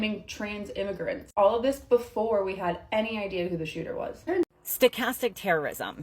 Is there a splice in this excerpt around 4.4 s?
yes; 1 cut; at 4.4 s

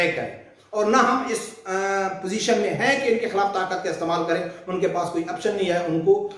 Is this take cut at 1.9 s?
no; 0 cuts

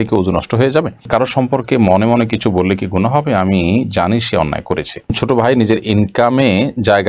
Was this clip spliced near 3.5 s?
no; 2 cuts; at 1.1 s, 5.1 s

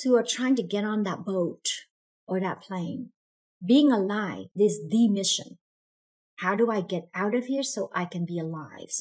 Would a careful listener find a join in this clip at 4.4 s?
yes; 1 cut; at 4.4 s

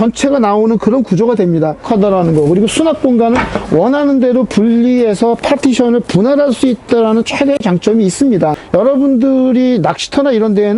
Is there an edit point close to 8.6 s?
yes; 2 cuts; at 1.8 s, 8.6 s

